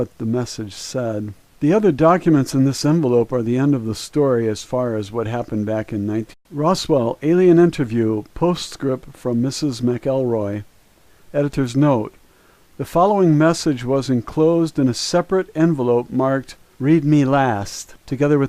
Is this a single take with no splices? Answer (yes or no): yes